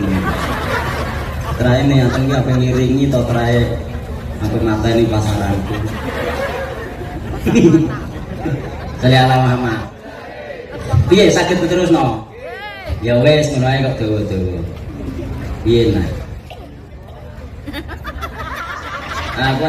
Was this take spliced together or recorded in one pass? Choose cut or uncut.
cut